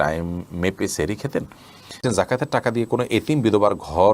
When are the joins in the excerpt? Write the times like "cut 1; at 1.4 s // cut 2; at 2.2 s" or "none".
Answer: cut 1; at 2.0 s